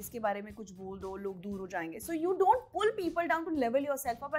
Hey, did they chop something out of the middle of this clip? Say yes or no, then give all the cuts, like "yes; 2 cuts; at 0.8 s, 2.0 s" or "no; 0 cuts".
no; 0 cuts